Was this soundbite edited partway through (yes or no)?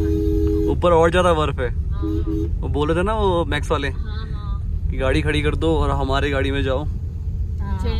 no